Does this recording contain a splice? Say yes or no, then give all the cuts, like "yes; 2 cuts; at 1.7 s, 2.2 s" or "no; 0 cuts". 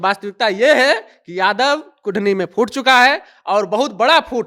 no; 0 cuts